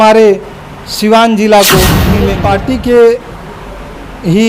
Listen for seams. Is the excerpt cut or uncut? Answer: cut